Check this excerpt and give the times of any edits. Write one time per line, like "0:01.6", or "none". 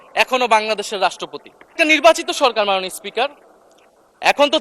0:01.8